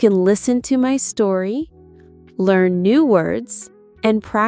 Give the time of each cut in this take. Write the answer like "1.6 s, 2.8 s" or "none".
none